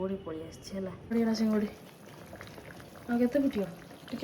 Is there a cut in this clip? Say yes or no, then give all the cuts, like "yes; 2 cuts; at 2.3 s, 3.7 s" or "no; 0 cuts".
yes; 1 cut; at 1.0 s